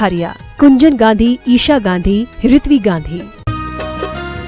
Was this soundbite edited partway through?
yes; 1 cut; at 3.4 s

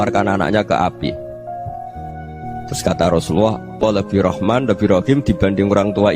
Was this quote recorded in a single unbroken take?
no; 1 cut; at 3.8 s

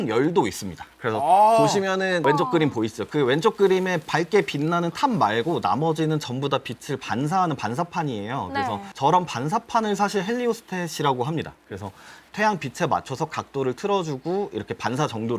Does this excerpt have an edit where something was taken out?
yes; 1 cut; at 2.2 s

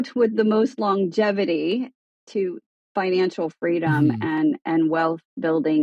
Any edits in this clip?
no; 0 cuts

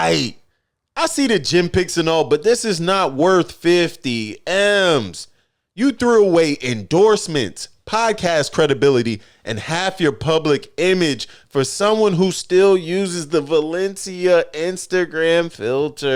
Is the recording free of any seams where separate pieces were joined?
yes; 0 cuts

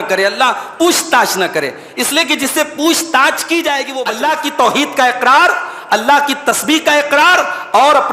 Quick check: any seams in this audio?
yes; 1 cut; at 3.9 s

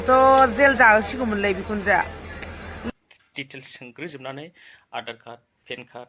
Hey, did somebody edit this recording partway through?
yes; 1 cut; at 2.9 s

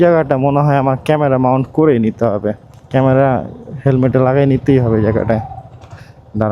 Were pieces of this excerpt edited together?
yes; 1 cut; at 2.7 s

